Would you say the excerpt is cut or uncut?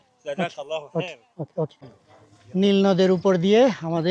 cut